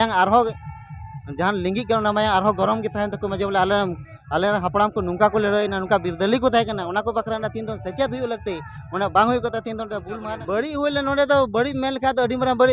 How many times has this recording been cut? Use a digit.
1